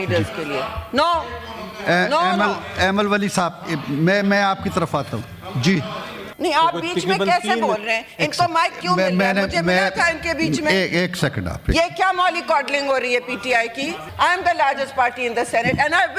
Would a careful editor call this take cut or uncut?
cut